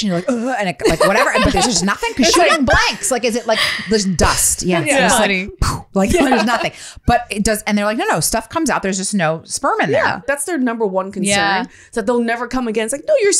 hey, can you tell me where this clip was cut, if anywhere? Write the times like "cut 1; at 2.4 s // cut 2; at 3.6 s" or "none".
cut 1; at 10.2 s